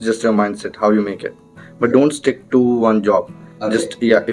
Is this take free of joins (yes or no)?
no